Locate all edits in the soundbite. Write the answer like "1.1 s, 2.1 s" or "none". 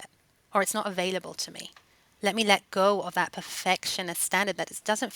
2.1 s